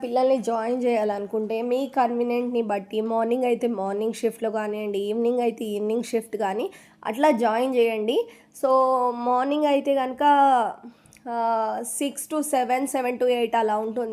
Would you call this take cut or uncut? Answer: uncut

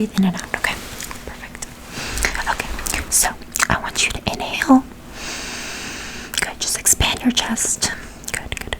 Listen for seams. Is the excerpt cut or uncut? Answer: uncut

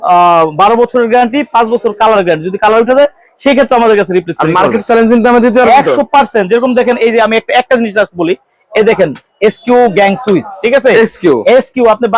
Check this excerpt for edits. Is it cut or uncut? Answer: uncut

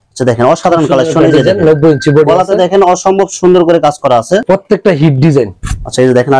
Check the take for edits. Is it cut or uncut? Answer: cut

